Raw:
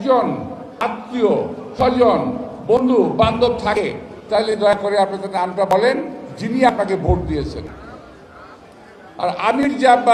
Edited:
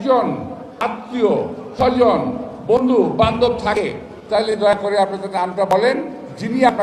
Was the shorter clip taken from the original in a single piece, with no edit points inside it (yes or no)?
yes